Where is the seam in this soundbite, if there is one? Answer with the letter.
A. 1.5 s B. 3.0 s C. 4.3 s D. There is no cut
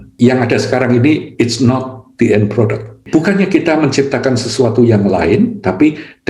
B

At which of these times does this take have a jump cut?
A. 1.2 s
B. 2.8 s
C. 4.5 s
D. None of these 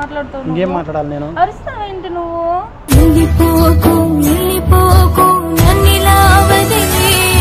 D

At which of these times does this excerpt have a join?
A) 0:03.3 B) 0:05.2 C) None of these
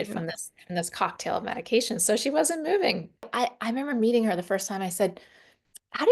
A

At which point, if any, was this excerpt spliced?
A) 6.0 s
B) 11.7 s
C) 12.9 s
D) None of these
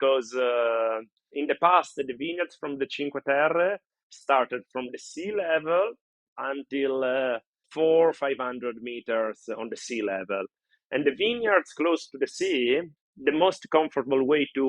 C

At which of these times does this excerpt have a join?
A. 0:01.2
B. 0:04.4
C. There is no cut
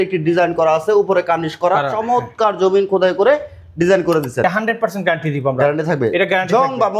B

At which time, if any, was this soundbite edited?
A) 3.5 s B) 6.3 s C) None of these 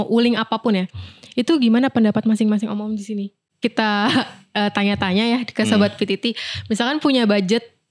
A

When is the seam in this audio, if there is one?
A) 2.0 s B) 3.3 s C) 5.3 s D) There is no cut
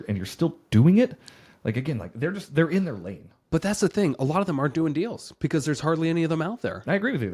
D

